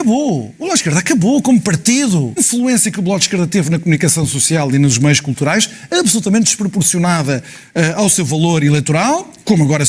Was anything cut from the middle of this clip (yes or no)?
yes